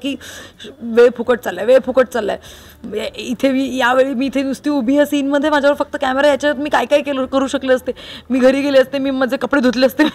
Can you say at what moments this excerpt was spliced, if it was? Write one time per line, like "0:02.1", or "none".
none